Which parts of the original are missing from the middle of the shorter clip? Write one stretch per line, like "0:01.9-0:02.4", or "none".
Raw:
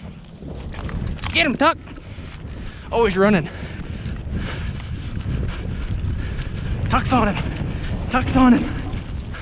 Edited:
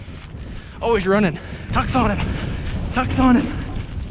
0:03.7-0:06.8